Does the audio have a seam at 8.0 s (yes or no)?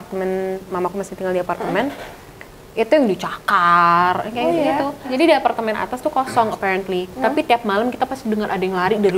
no